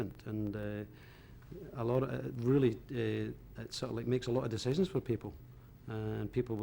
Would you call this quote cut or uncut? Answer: uncut